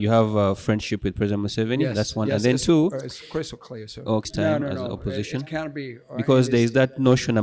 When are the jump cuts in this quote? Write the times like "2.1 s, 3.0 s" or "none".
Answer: 4.3 s

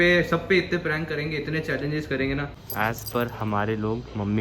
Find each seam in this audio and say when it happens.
2.7 s

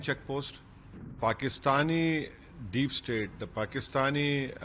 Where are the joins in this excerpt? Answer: 1.2 s

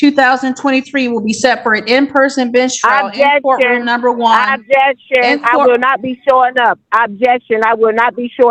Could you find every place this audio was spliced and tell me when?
none

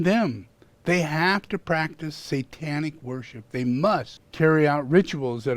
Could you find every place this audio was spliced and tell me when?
4.2 s

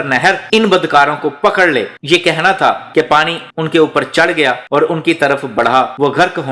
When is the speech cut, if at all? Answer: none

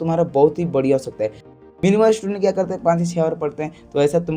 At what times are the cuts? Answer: 1.5 s

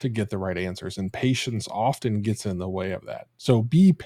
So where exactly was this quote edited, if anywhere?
none

